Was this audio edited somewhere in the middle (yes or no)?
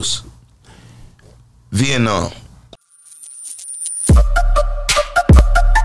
yes